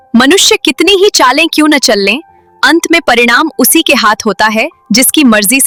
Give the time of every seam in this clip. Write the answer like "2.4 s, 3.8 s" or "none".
none